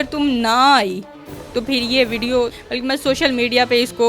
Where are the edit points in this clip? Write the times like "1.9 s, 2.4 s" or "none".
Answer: 2.6 s